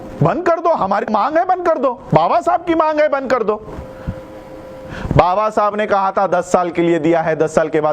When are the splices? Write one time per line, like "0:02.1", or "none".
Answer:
0:01.1